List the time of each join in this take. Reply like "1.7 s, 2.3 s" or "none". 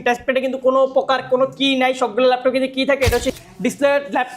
3.4 s